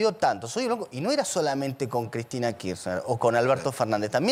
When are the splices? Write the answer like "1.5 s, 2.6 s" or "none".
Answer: none